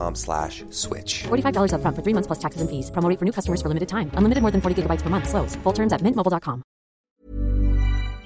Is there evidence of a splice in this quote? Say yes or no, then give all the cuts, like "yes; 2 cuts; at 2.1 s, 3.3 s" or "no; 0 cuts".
yes; 1 cut; at 7.0 s